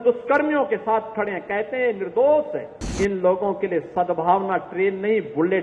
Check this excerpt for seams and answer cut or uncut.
cut